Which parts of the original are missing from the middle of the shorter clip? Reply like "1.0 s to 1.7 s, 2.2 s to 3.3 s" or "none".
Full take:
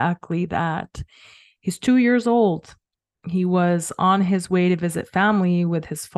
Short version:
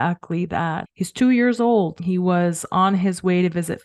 0.9 s to 1.5 s, 2.6 s to 3.2 s